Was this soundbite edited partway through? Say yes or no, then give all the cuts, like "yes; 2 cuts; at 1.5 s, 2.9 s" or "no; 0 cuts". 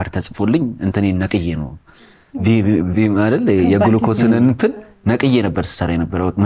no; 0 cuts